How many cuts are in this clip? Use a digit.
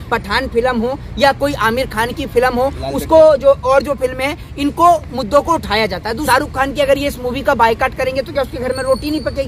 1